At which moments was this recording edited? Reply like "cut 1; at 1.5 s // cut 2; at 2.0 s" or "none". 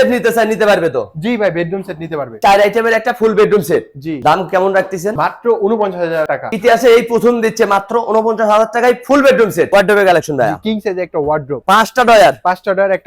cut 1; at 2.3 s // cut 2; at 6.5 s // cut 3; at 9.6 s